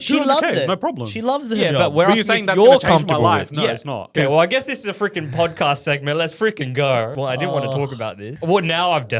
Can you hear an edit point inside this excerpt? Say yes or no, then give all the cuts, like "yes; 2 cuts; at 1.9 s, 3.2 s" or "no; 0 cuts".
yes; 3 cuts; at 4.1 s, 7.1 s, 8.3 s